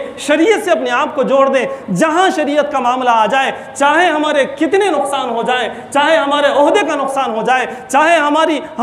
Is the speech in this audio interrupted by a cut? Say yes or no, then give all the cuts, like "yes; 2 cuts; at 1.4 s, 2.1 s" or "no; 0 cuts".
no; 0 cuts